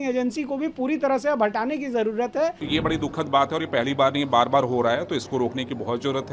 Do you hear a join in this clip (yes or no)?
yes